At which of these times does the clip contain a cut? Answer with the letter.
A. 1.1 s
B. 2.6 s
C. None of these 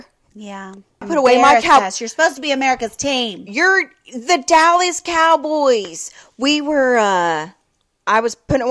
A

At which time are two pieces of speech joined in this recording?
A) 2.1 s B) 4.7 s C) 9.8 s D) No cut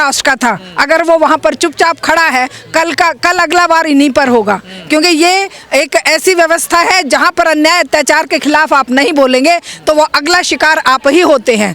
D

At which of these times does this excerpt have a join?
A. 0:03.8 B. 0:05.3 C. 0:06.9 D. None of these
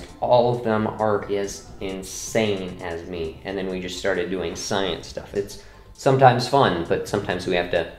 B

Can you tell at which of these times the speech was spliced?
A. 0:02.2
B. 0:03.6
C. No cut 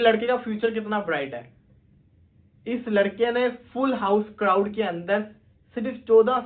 C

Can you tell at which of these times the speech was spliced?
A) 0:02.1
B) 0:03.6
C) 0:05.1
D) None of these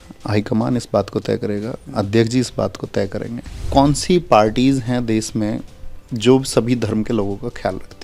B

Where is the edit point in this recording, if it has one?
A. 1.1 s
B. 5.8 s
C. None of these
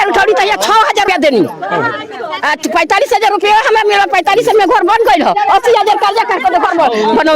A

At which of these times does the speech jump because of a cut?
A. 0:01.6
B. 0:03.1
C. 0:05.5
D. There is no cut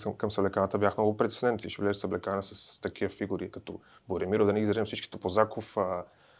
D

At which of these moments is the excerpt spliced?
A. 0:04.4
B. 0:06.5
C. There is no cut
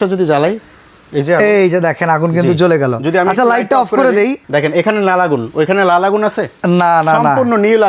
A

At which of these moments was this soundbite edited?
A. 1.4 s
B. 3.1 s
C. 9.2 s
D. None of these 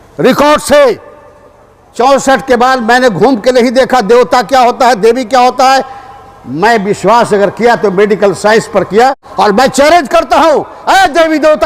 C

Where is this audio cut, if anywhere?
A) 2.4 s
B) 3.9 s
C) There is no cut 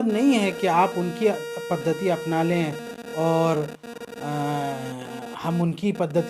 C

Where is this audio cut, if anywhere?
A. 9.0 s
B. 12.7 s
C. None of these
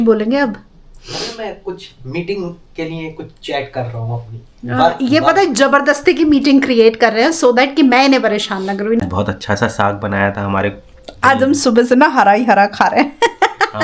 A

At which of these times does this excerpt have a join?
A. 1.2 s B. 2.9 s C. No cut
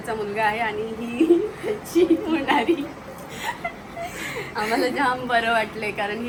C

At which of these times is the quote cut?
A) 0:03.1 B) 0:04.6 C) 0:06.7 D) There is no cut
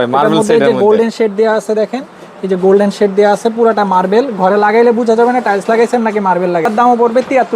C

